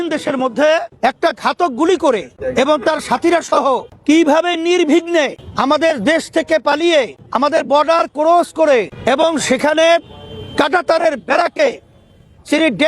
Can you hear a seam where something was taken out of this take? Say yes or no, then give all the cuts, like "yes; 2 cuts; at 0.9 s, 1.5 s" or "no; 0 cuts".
yes; 6 cuts; at 0.9 s, 2.4 s, 3.9 s, 5.4 s, 7.2 s, 8.9 s